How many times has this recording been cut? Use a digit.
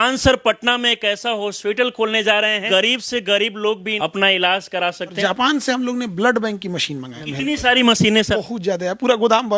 5